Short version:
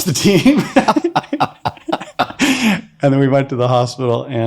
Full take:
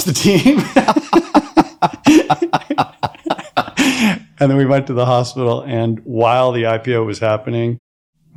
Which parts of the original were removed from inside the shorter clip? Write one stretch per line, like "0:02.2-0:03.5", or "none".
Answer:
0:01.0-0:02.4